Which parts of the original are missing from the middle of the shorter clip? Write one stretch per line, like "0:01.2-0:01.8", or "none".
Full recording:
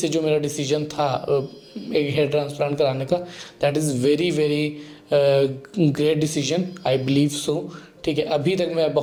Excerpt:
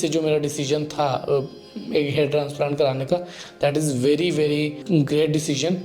0:04.8-0:05.6